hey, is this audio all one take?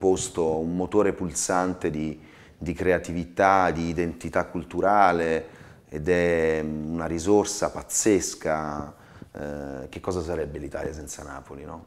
yes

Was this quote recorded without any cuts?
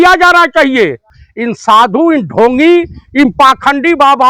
no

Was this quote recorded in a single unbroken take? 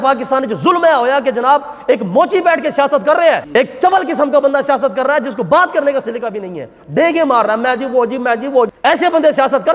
no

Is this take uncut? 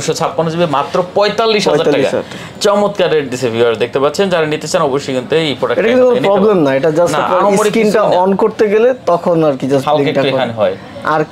yes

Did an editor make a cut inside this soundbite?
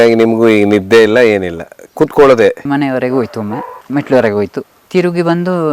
yes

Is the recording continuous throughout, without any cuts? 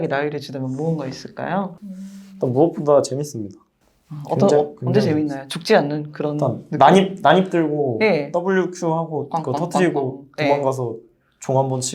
no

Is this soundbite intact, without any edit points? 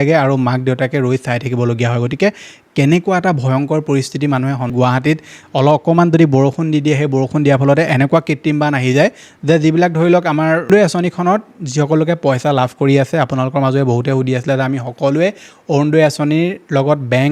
no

